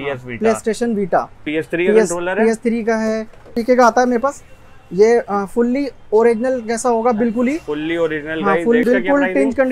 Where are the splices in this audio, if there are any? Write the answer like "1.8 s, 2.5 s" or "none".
1.5 s, 3.6 s, 8.8 s